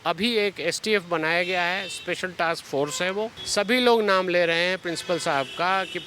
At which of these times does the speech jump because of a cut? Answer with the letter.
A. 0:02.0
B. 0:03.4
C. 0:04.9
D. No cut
B